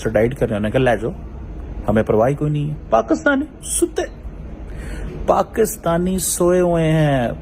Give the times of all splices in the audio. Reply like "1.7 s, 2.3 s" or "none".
2.9 s